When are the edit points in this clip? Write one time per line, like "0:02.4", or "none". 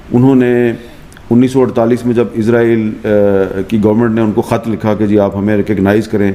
none